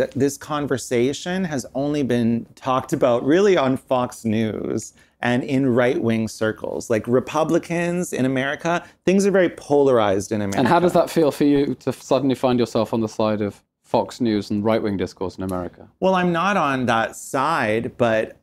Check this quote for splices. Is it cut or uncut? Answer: uncut